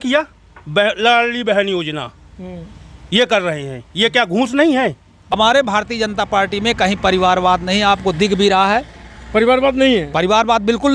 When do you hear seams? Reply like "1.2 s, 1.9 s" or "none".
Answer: 5.3 s